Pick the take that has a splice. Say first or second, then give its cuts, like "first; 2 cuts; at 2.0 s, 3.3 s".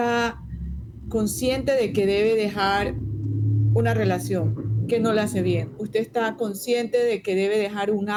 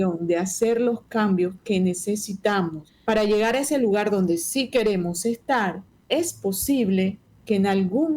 second; 3 cuts; at 2.9 s, 5.9 s, 7.3 s